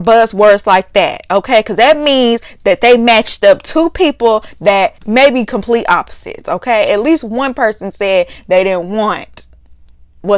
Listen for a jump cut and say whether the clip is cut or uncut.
cut